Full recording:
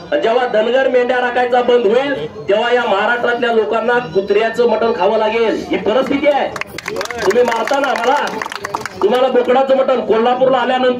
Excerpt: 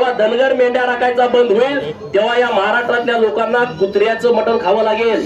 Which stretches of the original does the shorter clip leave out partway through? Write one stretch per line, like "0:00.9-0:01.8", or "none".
none